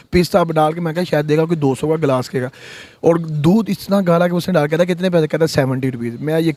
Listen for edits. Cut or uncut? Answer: uncut